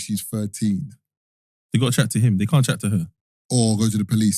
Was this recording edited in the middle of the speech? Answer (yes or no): no